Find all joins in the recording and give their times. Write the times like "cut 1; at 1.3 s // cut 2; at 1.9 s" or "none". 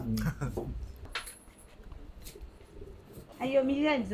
cut 1; at 1.0 s // cut 2; at 3.3 s